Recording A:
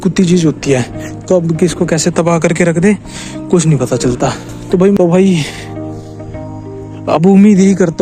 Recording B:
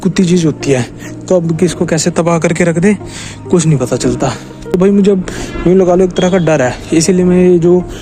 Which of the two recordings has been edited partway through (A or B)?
A